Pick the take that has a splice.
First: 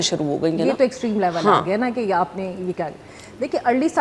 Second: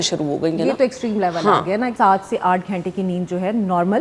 second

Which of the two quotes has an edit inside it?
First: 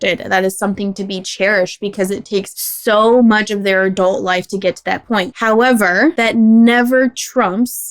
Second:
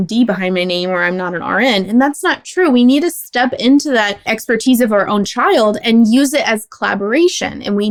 first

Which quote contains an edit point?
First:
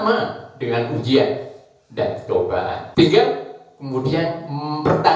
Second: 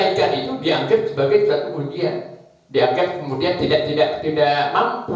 first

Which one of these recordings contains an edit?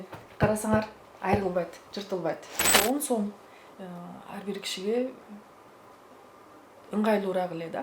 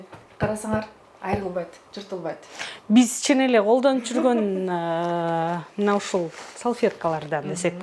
first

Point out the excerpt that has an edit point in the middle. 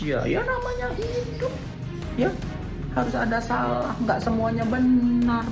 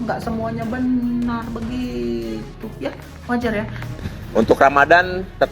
second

